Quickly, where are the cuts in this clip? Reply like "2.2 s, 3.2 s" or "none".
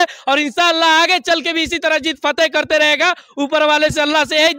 none